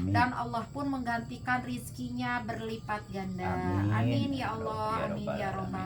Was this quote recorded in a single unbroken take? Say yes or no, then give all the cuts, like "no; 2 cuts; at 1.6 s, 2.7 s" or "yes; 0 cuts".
yes; 0 cuts